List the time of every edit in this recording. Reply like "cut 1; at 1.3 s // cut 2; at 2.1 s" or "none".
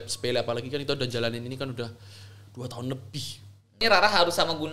cut 1; at 3.8 s